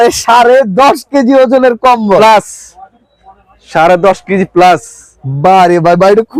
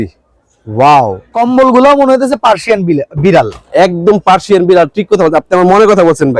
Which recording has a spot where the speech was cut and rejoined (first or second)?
second